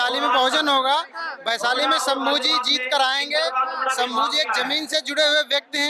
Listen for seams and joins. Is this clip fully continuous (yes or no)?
yes